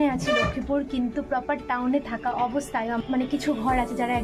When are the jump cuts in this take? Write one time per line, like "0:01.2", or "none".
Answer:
0:03.0